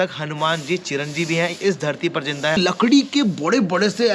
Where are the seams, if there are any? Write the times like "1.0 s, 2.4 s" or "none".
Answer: 2.6 s